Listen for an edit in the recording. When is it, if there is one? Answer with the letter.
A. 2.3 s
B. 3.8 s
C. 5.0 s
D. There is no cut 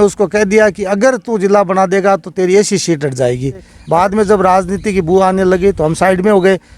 B